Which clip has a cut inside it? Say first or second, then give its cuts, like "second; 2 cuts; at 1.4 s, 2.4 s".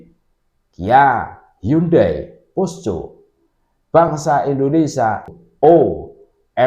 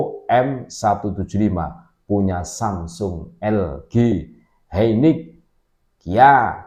first; 1 cut; at 5.5 s